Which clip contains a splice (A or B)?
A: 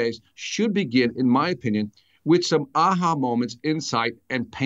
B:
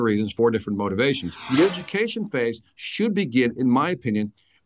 B